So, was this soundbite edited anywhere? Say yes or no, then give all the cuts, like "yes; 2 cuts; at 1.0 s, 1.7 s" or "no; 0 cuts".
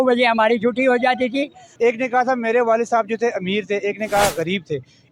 yes; 1 cut; at 1.6 s